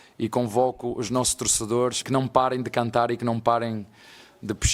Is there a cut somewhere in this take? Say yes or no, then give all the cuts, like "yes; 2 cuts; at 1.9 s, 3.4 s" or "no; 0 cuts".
yes; 1 cut; at 2.0 s